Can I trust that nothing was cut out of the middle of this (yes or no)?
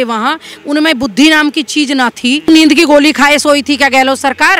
no